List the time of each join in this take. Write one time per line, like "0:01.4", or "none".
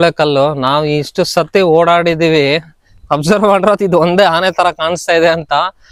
none